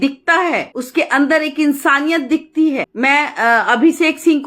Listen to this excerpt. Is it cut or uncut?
uncut